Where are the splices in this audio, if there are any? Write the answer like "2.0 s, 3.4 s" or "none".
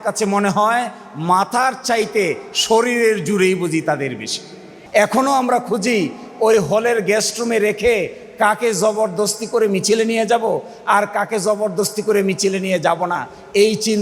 4.8 s